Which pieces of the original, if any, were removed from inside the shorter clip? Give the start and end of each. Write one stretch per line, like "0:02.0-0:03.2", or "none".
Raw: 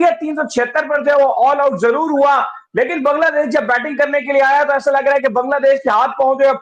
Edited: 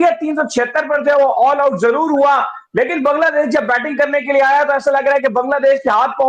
none